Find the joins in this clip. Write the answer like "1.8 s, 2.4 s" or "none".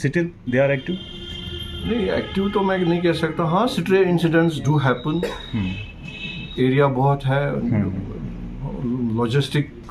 none